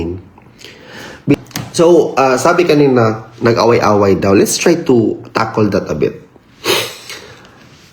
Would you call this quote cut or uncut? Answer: cut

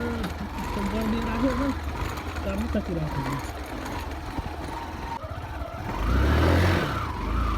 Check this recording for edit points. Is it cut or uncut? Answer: cut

